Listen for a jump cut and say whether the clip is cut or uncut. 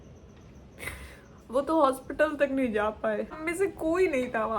cut